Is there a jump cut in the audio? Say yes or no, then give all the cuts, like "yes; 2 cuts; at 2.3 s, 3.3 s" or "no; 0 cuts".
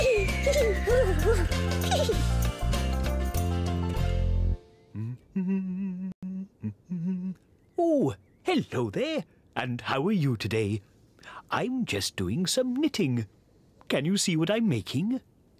yes; 1 cut; at 1.9 s